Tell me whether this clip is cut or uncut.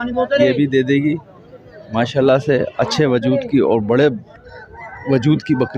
uncut